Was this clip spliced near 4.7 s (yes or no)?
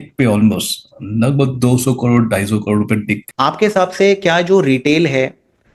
no